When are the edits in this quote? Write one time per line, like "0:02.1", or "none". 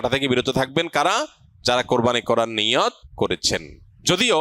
0:03.4